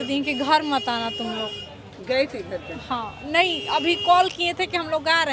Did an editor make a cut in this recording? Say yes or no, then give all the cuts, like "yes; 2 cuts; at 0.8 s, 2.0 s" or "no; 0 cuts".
no; 0 cuts